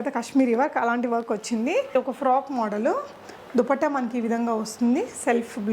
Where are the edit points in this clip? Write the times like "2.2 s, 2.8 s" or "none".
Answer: 1.9 s